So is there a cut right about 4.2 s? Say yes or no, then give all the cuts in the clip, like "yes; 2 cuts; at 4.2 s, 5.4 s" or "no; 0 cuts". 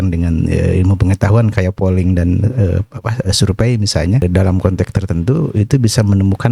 yes; 1 cut; at 4.2 s